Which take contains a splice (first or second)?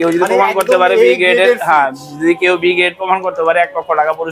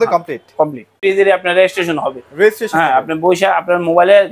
second